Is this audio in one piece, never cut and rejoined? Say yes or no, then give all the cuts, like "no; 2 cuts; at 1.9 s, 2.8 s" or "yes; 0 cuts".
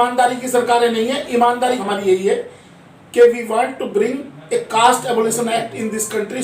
no; 1 cut; at 1.8 s